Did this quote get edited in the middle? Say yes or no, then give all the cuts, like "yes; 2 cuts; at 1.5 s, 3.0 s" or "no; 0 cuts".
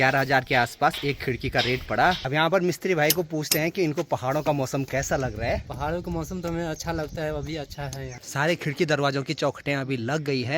yes; 2 cuts; at 2.2 s, 8.1 s